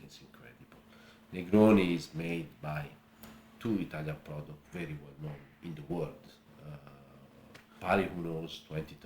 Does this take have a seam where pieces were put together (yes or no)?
yes